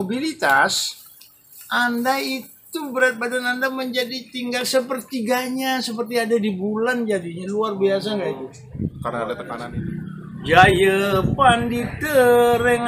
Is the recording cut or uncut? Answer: cut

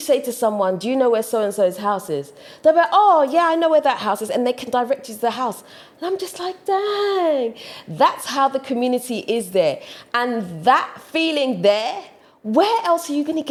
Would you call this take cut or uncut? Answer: uncut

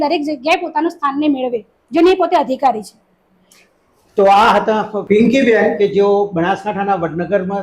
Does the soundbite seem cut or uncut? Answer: uncut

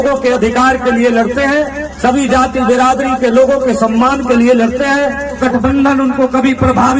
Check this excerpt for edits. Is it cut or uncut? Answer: cut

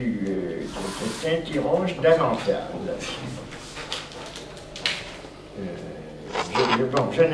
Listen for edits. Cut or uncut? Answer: uncut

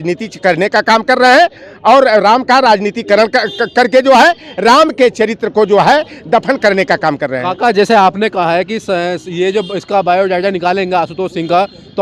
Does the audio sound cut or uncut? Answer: uncut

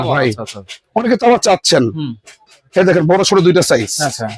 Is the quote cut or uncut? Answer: uncut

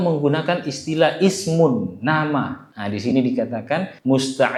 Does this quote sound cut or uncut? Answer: uncut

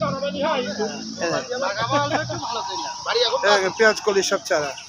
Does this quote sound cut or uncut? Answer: uncut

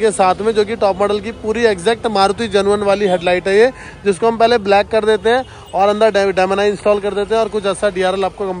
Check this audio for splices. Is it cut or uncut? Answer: uncut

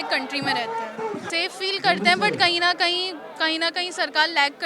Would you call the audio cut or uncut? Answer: cut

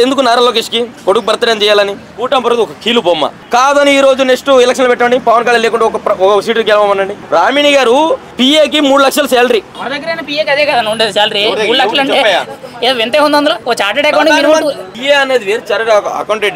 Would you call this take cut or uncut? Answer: cut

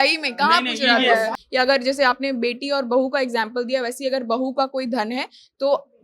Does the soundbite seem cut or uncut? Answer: cut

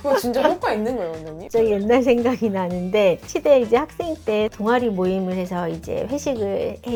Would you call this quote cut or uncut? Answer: uncut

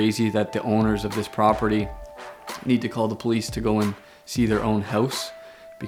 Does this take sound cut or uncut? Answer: uncut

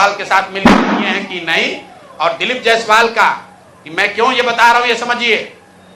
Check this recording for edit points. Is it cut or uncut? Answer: uncut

